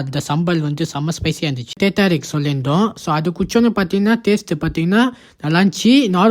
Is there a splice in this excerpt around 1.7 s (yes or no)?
yes